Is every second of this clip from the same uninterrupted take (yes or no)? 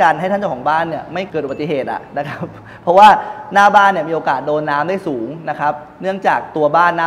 yes